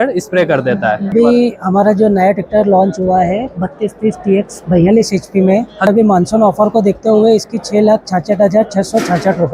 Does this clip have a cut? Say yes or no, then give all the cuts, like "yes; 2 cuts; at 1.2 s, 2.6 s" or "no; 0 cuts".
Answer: yes; 2 cuts; at 1.1 s, 5.9 s